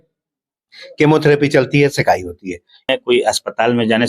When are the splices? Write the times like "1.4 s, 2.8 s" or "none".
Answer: 2.9 s